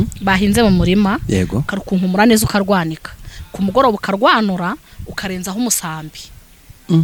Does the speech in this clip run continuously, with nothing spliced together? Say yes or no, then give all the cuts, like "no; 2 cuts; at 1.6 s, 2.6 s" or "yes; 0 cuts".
yes; 0 cuts